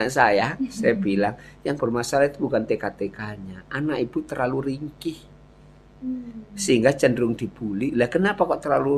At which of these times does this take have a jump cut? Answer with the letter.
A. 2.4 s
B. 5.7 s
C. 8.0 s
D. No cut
D